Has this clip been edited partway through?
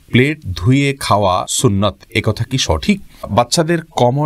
yes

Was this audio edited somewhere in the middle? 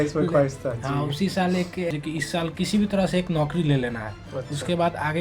yes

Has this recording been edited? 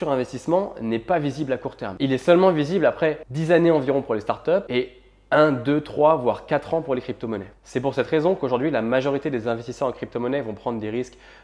yes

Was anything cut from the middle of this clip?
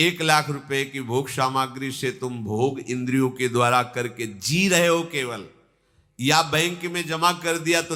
no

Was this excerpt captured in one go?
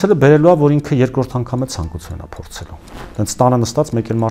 no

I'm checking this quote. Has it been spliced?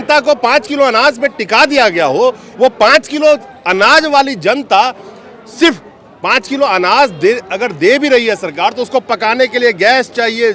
no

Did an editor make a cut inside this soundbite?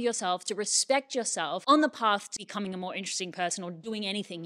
yes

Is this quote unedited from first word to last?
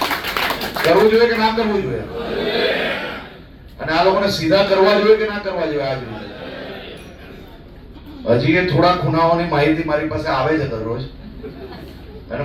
yes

